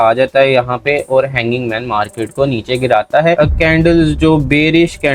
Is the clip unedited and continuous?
no; 1 cut; at 3.4 s

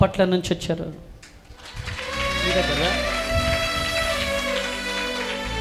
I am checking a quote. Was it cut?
no; 0 cuts

